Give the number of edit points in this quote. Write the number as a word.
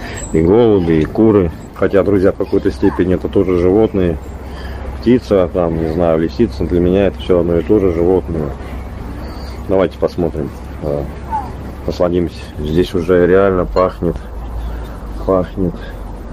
two